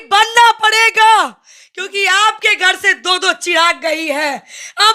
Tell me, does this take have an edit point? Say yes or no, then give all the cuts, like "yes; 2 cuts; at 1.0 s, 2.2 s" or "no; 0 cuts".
no; 0 cuts